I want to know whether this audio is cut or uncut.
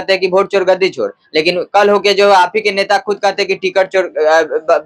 uncut